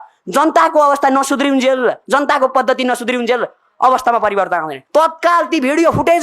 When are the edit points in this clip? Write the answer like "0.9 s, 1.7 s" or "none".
4.8 s